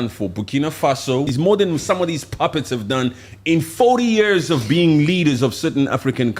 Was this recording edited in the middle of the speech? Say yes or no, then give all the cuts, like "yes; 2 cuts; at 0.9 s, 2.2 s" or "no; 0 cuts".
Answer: yes; 1 cut; at 1.3 s